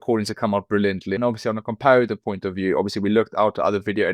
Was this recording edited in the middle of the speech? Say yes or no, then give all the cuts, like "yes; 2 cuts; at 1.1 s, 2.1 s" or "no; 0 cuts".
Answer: yes; 1 cut; at 1.1 s